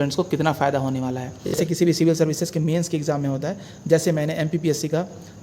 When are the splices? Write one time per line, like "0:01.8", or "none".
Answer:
0:01.6